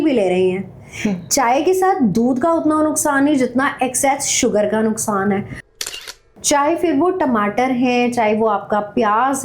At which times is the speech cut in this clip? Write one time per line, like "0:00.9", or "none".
0:05.9